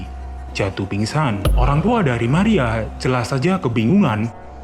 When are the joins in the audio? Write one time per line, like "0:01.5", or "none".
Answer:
0:01.5